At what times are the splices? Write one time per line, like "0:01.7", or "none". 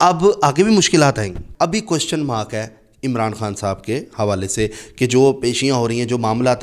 0:01.4